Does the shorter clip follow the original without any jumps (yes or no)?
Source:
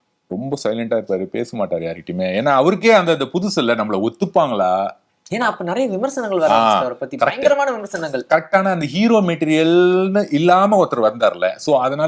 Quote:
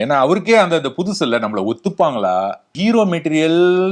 no